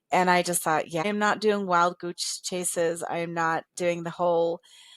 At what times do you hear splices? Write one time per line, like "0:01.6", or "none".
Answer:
0:01.0

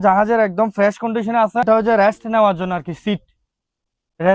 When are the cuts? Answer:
0:01.6

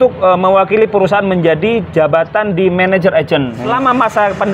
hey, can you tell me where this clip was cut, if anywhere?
0:03.6

